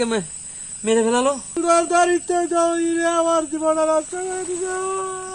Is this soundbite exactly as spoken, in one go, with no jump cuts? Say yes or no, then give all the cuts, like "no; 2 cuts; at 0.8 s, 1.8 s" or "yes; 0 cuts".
no; 1 cut; at 1.6 s